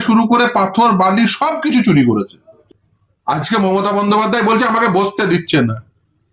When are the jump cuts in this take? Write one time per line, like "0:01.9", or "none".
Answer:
0:02.6

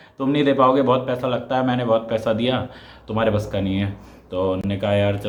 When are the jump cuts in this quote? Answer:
none

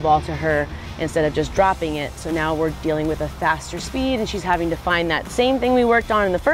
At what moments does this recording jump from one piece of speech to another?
none

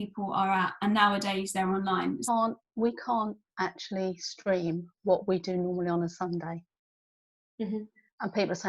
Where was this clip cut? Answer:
0:02.2

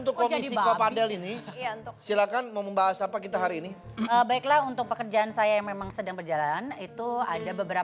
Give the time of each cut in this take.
none

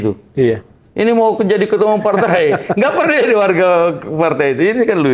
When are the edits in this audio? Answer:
none

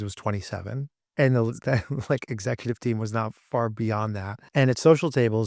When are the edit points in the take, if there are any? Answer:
0:01.0
0:04.4

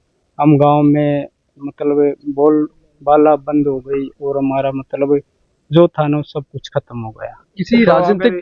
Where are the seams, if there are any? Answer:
none

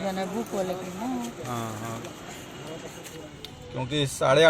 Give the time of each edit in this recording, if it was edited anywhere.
0:02.9

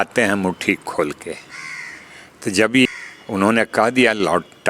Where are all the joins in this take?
0:02.9

